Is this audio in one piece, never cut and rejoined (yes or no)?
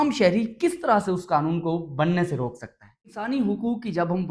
no